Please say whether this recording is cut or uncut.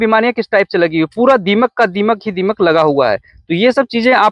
uncut